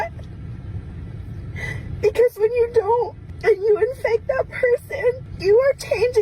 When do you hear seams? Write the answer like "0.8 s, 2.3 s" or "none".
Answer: 3.2 s, 5.3 s